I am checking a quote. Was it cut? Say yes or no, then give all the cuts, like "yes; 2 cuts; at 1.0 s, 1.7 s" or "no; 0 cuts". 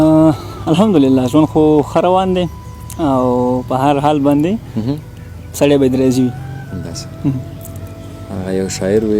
no; 0 cuts